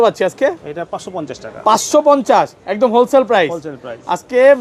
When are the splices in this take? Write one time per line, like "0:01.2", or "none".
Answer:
none